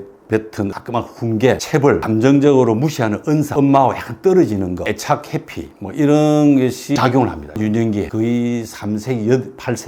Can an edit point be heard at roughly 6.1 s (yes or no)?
no